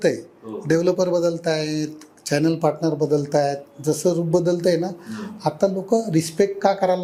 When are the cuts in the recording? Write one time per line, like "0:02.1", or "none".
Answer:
none